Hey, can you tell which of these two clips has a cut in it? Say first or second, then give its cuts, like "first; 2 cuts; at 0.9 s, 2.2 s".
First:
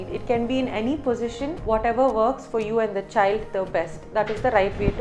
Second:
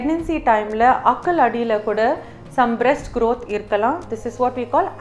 first; 1 cut; at 1.5 s